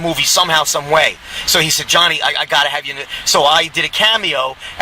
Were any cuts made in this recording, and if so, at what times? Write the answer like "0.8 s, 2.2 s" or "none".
1.6 s